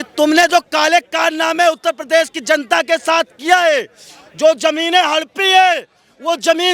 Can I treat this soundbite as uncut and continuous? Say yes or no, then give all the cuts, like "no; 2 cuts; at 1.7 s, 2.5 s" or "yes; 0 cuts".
yes; 0 cuts